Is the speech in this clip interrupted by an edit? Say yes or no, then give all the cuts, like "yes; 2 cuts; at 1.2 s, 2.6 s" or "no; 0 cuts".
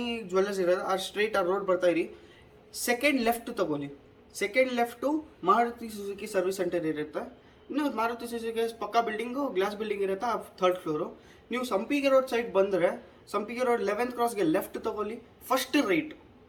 no; 0 cuts